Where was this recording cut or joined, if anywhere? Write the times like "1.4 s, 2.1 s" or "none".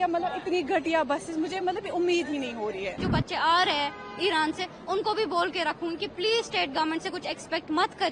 3.0 s